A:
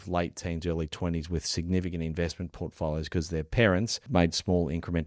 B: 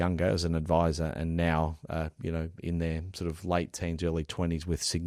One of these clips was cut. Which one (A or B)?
A